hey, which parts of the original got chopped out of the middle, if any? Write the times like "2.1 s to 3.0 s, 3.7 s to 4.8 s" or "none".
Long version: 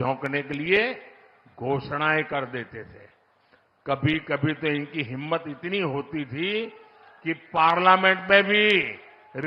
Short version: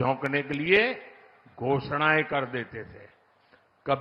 none